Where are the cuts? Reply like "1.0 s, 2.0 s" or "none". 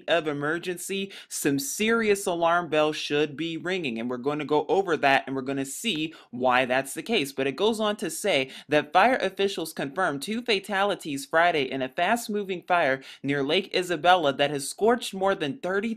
none